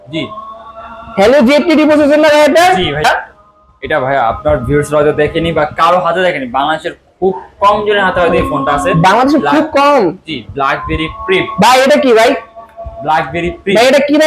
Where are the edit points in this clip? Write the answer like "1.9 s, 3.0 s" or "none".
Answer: 3.0 s